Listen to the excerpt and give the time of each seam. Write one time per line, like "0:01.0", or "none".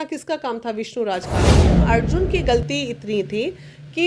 0:01.7